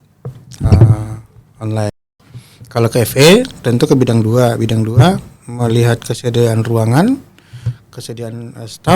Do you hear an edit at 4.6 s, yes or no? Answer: no